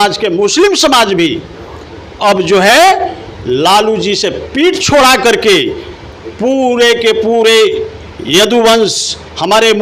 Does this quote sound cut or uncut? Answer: uncut